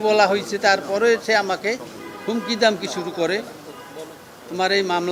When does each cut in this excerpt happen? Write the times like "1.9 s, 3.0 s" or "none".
none